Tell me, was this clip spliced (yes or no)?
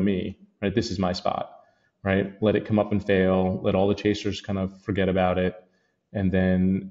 no